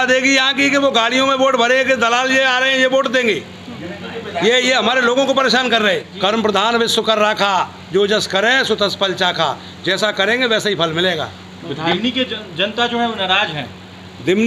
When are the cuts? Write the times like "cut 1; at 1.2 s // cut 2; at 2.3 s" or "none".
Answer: cut 1; at 6.1 s